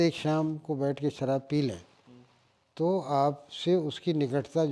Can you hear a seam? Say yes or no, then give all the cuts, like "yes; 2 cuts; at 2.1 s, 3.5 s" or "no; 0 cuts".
no; 0 cuts